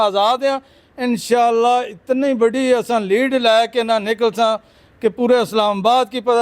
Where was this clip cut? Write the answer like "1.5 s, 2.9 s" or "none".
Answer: none